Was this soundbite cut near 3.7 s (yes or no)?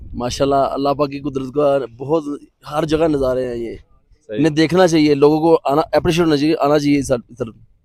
no